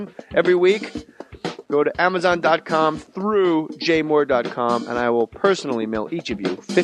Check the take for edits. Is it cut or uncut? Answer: cut